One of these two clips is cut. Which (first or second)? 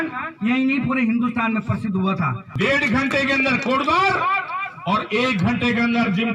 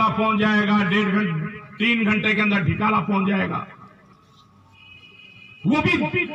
first